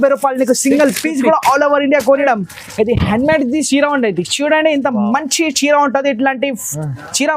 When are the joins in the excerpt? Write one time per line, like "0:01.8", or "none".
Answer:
0:02.2

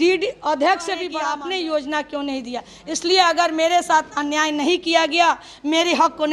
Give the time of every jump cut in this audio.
0:01.1

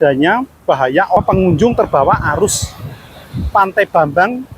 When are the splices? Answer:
0:01.2

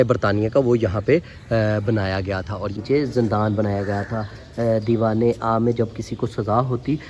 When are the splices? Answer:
0:02.8

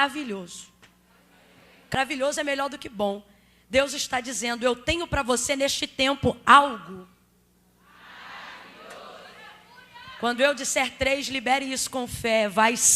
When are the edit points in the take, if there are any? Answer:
0:01.9

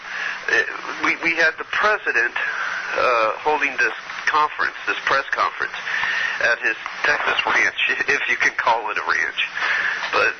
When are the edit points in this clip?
0:02.7

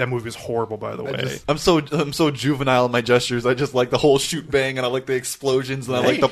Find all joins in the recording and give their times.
0:01.3

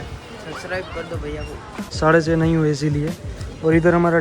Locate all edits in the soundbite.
0:01.9

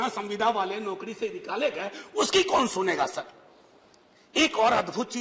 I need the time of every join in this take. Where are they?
none

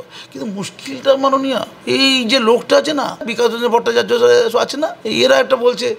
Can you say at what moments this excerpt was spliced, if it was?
0:01.7
0:03.3
0:05.0

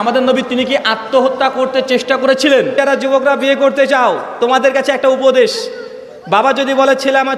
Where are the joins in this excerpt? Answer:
0:02.7

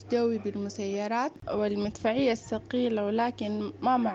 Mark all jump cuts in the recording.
0:01.4

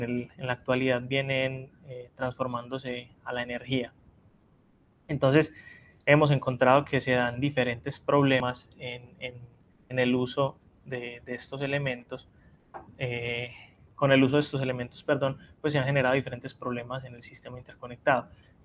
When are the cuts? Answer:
0:08.4

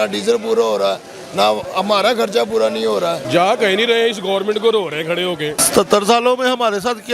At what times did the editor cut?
0:03.2
0:05.6

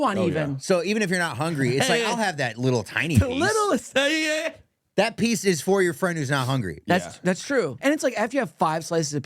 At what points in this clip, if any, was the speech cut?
0:07.7

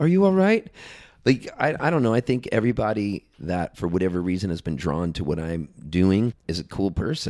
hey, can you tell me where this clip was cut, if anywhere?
0:06.4

